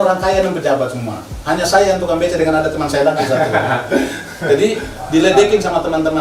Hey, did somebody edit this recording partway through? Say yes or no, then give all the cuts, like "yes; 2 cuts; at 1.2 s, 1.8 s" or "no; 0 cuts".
no; 0 cuts